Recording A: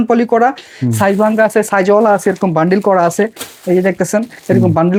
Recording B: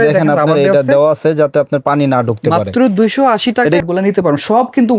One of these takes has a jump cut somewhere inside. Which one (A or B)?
B